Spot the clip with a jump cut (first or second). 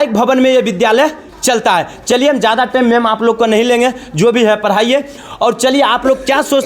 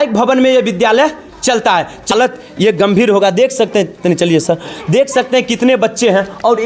second